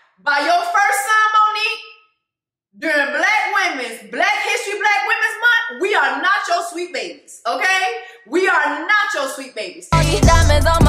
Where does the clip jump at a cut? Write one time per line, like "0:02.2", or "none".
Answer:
0:09.9